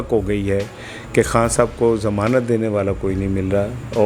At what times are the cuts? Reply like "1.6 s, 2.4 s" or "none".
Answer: none